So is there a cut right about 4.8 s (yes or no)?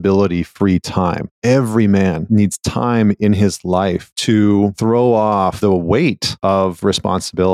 yes